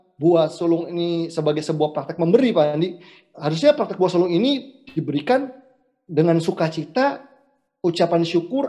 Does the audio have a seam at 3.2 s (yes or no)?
no